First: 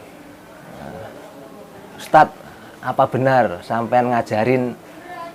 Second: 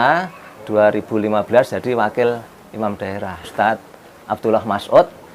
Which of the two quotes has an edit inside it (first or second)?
second